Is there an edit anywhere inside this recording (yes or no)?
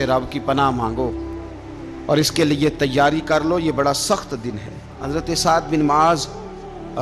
yes